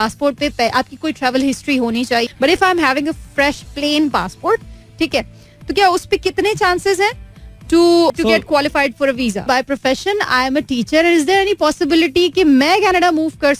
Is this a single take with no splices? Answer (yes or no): no